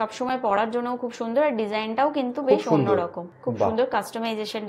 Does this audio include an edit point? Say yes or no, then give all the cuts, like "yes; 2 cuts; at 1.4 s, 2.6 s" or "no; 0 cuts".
yes; 1 cut; at 3.3 s